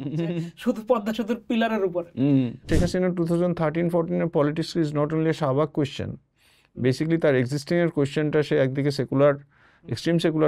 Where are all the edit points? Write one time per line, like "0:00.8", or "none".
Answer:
0:02.6

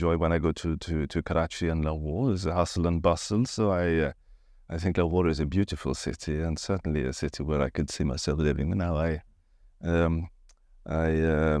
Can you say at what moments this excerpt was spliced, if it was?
none

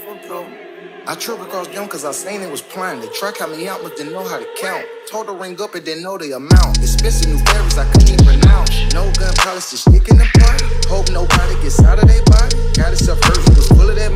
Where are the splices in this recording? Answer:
none

